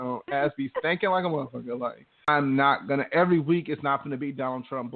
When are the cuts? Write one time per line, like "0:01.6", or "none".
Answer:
0:02.3